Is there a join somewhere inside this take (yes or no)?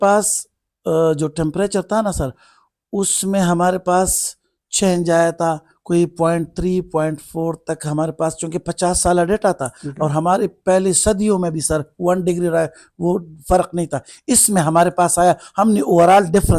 no